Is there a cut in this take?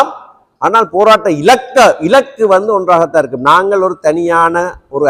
no; 0 cuts

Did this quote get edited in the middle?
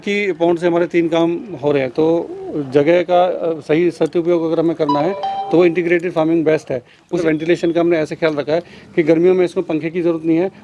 yes; 1 cut; at 7.2 s

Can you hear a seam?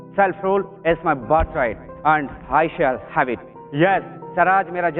no; 0 cuts

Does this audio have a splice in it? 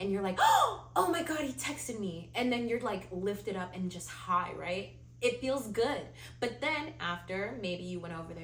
no; 0 cuts

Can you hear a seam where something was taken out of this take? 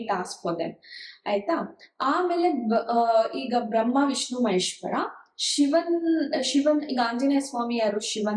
no; 0 cuts

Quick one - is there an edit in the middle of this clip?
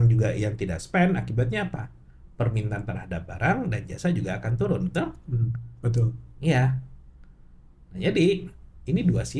no; 0 cuts

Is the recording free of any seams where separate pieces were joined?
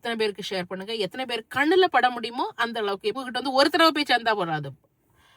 no; 1 cut; at 3.2 s

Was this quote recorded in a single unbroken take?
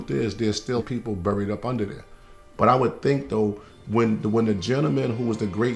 yes; 0 cuts

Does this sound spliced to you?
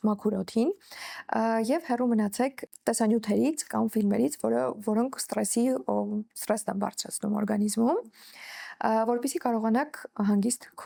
no; 0 cuts

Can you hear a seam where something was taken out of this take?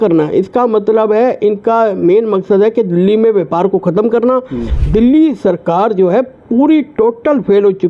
yes; 1 cut; at 4.7 s

